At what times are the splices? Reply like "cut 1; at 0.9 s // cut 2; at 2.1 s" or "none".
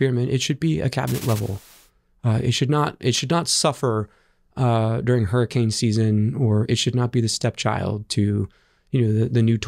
none

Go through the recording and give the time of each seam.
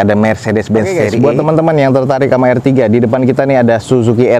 cut 1; at 1.0 s

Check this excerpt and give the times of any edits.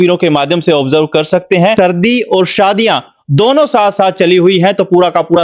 cut 1; at 1.7 s

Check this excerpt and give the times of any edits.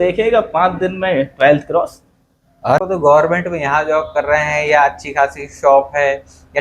cut 1; at 2.8 s

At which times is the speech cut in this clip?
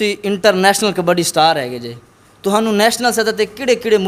none

